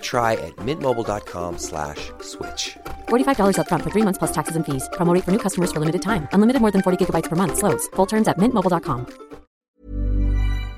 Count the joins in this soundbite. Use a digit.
1